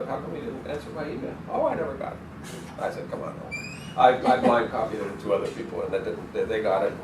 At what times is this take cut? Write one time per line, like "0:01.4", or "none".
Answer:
0:01.4